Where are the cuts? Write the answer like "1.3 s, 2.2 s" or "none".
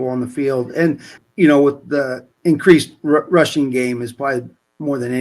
1.1 s, 2.2 s